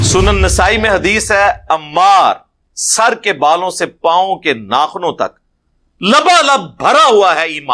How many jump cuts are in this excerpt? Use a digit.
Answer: 0